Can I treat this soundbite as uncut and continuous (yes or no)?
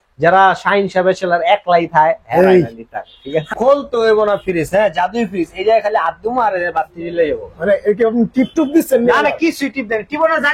no